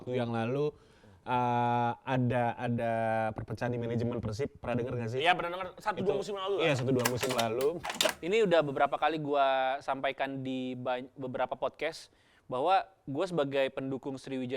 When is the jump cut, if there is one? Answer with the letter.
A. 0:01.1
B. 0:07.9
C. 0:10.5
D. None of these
B